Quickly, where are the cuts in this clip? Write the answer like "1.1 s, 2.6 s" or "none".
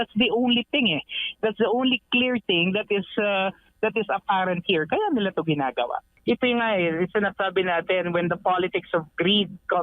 6.1 s